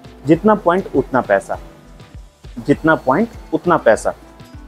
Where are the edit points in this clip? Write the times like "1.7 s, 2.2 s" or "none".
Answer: none